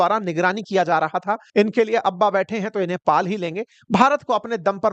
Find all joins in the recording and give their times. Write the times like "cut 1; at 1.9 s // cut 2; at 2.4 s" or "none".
cut 1; at 1.4 s